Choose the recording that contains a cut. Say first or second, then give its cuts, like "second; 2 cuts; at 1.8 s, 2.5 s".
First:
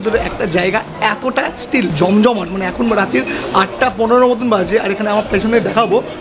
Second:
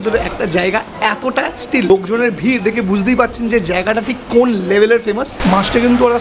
second; 2 cuts; at 1.9 s, 5.3 s